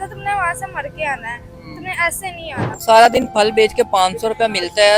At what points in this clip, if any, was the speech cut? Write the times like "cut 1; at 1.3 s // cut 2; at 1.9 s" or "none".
cut 1; at 2.7 s